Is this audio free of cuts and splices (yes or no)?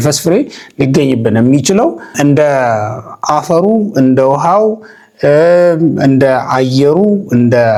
yes